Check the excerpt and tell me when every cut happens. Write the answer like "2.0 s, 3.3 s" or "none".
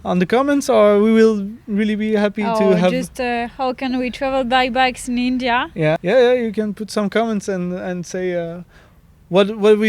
6.0 s